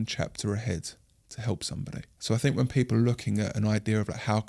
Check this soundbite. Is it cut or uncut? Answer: cut